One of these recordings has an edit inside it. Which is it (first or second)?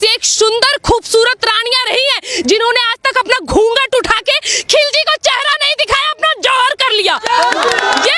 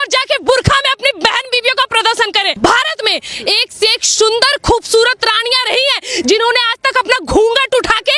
second